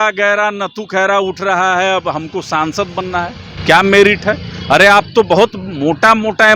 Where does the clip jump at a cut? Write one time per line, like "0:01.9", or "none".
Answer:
none